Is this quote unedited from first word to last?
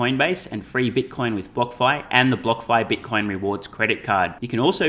yes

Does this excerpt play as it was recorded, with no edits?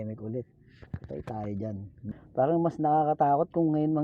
no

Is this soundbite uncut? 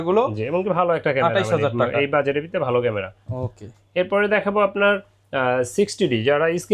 yes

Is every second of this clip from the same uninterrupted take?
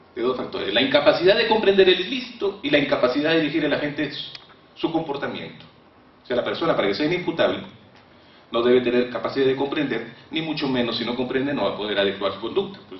no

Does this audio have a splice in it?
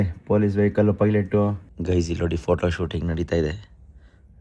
yes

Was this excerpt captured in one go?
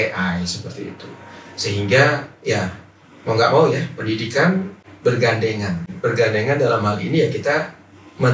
no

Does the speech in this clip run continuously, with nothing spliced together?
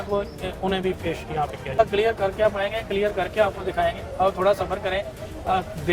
no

